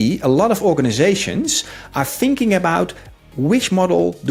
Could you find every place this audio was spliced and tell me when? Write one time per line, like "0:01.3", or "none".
none